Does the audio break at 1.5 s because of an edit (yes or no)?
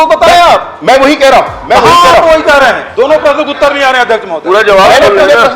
no